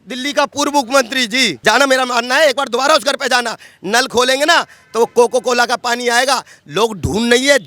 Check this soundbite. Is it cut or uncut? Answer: cut